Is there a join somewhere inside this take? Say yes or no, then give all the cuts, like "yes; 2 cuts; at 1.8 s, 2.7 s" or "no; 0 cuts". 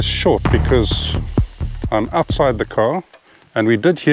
no; 0 cuts